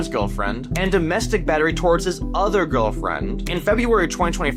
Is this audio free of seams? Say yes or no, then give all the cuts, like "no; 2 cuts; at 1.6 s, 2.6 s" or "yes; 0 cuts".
yes; 0 cuts